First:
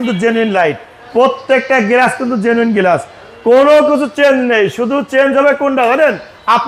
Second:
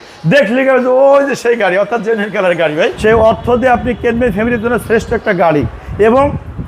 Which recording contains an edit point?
second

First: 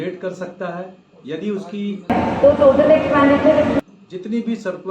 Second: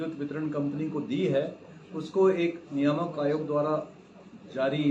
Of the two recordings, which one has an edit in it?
first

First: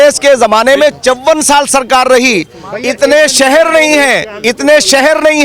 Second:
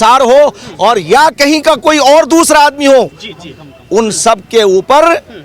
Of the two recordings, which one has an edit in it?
first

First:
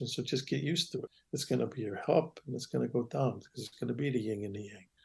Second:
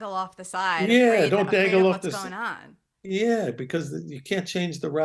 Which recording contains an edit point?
first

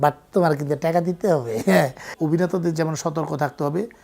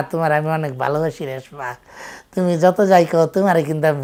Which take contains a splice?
first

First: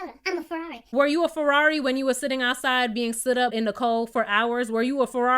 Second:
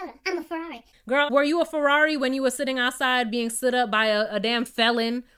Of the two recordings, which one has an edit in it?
first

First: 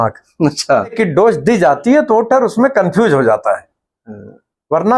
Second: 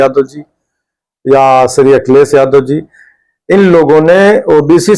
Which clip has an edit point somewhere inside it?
first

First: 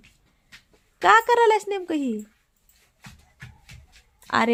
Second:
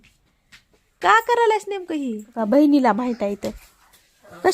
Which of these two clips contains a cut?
second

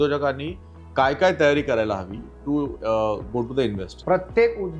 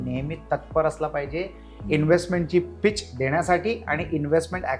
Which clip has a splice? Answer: first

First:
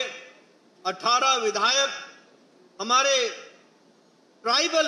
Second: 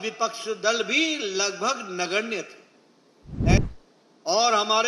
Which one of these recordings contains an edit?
second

